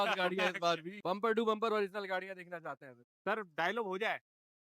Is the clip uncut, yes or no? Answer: no